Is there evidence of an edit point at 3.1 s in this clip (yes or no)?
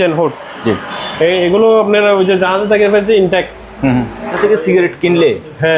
no